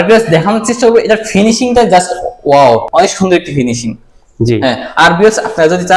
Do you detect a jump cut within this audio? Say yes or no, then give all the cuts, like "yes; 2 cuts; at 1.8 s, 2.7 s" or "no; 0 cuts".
yes; 1 cut; at 2.9 s